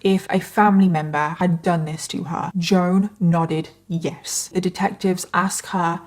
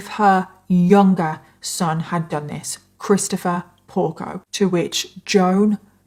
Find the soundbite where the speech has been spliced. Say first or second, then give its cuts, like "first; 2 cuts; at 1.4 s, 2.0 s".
first; 3 cuts; at 1.3 s, 2.5 s, 4.5 s